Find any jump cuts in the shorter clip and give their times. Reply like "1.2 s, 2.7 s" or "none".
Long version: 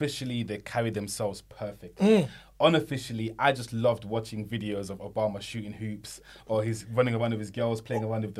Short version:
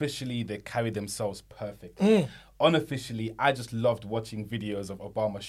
none